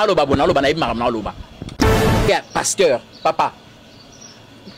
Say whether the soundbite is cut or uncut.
cut